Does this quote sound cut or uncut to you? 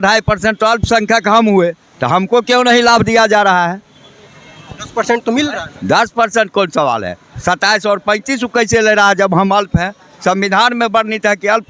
uncut